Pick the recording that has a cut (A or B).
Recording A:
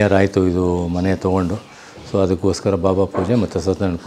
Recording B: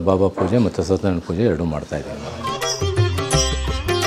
B